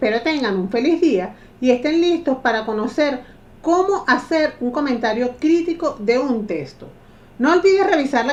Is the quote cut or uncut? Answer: uncut